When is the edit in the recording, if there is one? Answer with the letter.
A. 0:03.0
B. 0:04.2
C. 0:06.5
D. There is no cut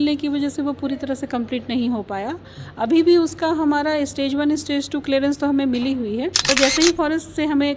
C